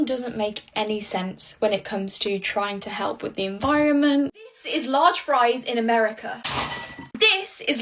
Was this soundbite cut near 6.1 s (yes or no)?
no